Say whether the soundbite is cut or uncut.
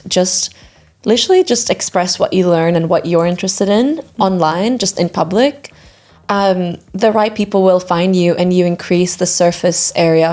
uncut